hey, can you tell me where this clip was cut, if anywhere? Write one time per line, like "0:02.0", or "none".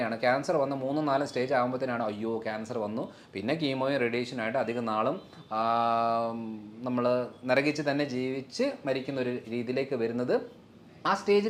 none